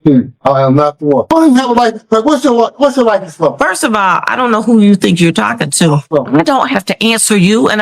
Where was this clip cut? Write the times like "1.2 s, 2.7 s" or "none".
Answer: 1.3 s, 6.0 s